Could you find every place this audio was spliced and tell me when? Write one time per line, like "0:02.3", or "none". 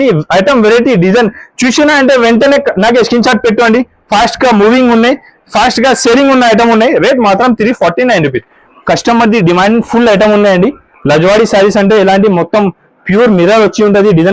0:08.6